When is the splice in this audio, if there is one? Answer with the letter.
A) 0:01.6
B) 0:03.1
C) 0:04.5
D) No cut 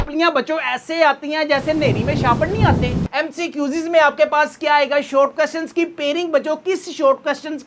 B